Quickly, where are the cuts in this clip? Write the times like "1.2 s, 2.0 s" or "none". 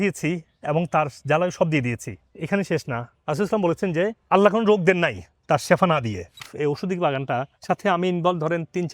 6.5 s, 7.5 s